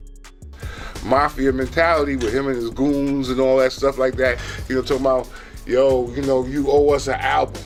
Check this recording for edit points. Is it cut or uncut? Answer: uncut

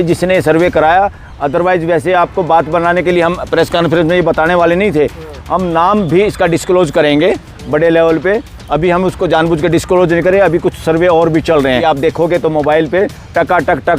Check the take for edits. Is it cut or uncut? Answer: cut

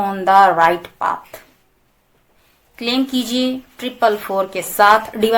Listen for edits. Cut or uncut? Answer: uncut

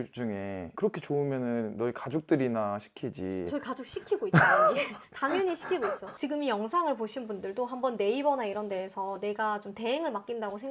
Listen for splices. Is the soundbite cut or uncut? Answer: uncut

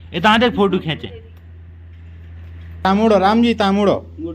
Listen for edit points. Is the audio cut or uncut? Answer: cut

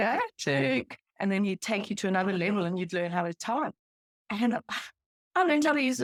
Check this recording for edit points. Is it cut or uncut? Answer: uncut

